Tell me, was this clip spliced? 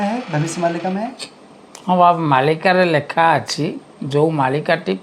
no; 0 cuts

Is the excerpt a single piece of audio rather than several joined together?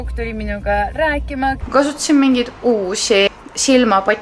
no; 2 cuts; at 1.6 s, 3.3 s

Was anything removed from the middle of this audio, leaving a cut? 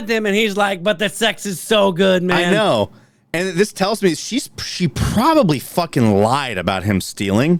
no; 0 cuts

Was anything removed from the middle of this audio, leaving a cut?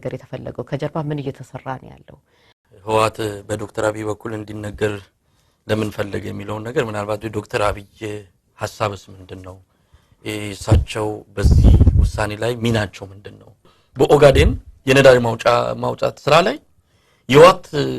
yes; 2 cuts; at 2.6 s, 13.8 s

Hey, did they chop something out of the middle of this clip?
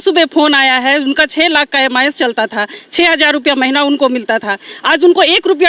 no; 0 cuts

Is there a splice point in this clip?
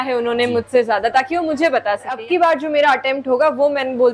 yes; 1 cut; at 2.2 s

